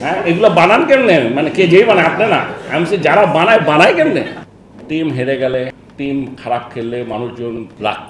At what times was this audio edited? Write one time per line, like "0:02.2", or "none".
0:04.4